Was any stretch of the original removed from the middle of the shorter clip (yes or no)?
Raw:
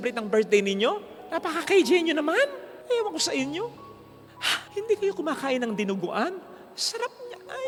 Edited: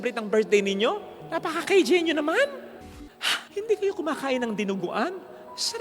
yes